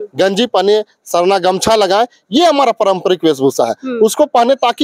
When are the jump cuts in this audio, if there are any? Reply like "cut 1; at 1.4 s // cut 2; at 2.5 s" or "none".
none